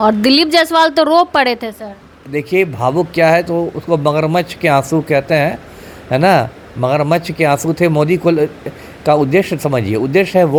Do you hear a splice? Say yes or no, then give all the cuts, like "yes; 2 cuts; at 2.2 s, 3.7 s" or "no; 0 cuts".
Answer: no; 0 cuts